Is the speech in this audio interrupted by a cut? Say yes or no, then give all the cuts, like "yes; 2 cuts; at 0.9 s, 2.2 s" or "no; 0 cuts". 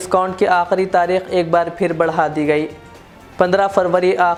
no; 0 cuts